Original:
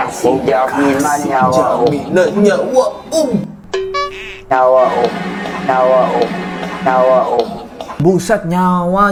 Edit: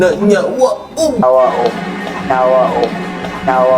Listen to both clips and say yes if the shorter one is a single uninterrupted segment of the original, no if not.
no